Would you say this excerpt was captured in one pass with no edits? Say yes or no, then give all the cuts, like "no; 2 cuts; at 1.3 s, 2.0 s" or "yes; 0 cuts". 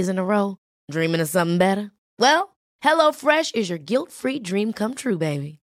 yes; 0 cuts